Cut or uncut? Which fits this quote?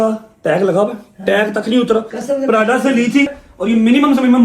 cut